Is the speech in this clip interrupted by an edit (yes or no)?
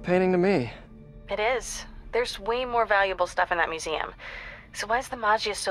no